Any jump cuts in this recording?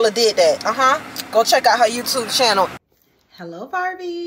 yes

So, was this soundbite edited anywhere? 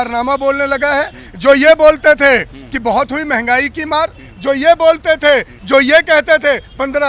no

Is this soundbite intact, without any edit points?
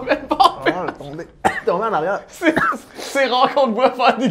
yes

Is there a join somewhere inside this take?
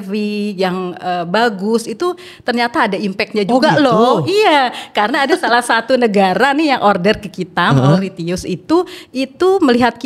no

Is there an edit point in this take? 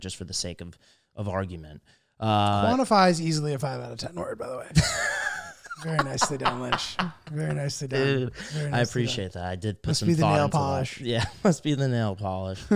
no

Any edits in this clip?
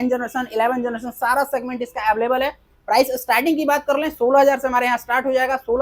no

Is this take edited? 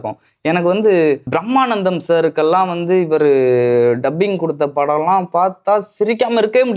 yes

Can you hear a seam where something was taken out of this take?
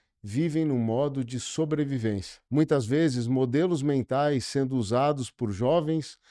yes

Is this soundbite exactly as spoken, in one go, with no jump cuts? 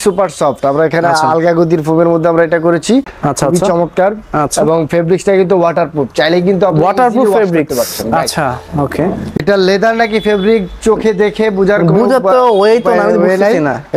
no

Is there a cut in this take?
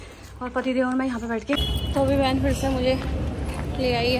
yes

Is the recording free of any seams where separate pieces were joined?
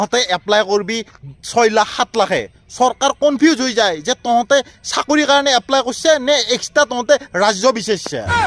yes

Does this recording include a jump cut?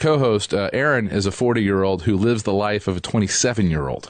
yes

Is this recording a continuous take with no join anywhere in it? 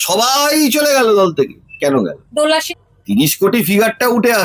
no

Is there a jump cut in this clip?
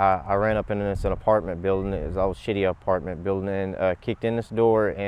no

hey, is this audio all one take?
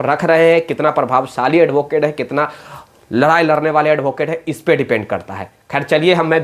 yes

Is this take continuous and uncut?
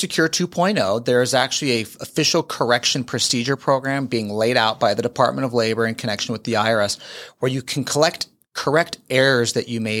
yes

